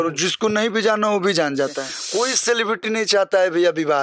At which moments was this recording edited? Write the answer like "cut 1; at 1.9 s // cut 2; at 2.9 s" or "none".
cut 1; at 1.9 s